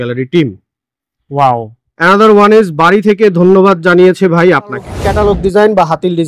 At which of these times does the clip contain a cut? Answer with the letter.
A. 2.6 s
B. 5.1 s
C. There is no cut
B